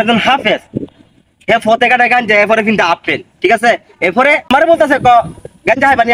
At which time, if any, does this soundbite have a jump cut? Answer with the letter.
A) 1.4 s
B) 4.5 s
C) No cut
B